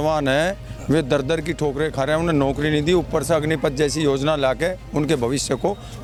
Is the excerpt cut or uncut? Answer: uncut